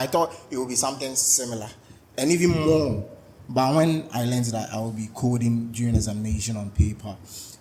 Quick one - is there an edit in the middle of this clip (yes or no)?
no